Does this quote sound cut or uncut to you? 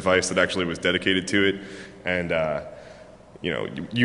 uncut